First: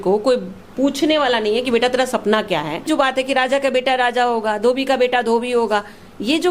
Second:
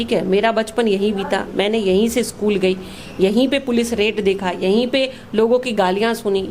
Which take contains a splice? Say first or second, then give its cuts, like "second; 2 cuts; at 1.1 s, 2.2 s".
first; 1 cut; at 2.8 s